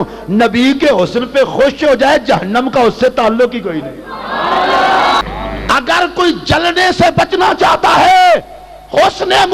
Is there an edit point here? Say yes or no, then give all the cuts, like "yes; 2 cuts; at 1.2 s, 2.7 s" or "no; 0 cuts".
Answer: yes; 1 cut; at 5.2 s